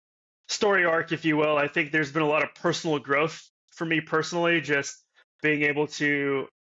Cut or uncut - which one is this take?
uncut